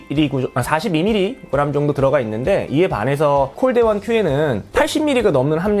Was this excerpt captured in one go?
yes; 0 cuts

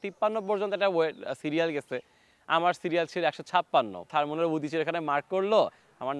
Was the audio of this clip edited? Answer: yes; 1 cut; at 4.1 s

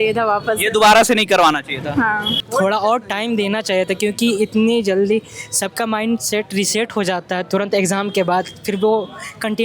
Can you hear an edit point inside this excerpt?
yes; 1 cut; at 2.3 s

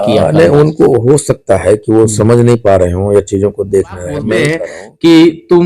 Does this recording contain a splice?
yes; 1 cut; at 4.6 s

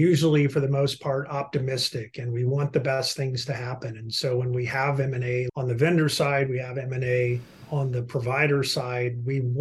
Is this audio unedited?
no; 1 cut; at 5.5 s

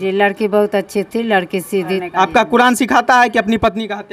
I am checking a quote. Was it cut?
yes; 1 cut; at 2.0 s

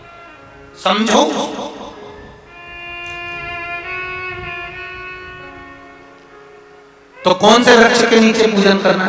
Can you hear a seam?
no; 0 cuts

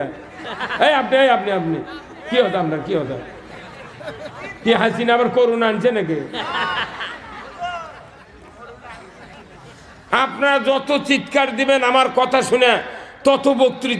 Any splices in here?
no; 0 cuts

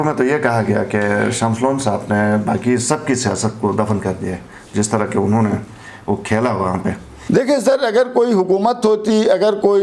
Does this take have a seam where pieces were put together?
yes; 1 cut; at 7.1 s

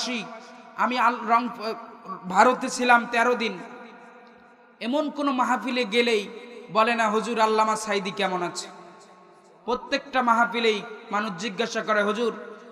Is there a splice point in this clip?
no; 0 cuts

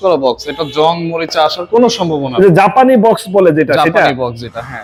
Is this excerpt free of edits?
yes; 0 cuts

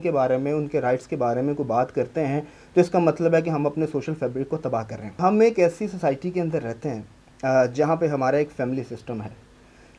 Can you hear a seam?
yes; 1 cut; at 5.2 s

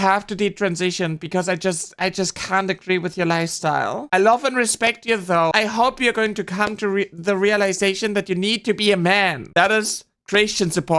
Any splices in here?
yes; 2 cuts; at 5.5 s, 9.4 s

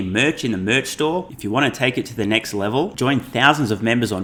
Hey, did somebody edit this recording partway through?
no; 0 cuts

